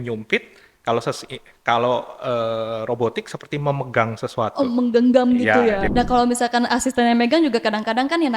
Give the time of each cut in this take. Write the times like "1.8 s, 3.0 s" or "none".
5.9 s